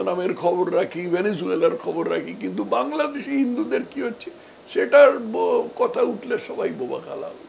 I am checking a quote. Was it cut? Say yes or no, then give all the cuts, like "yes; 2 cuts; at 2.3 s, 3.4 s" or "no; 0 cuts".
no; 0 cuts